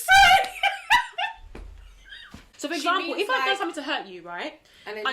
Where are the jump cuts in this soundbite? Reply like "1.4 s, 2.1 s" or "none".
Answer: 2.4 s